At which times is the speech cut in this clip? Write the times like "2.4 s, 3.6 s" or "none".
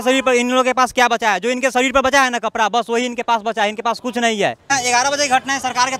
none